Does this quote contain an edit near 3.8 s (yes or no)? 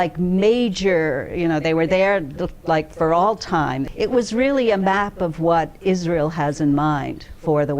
yes